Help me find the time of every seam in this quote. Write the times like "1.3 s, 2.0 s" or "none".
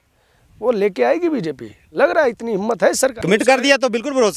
3.2 s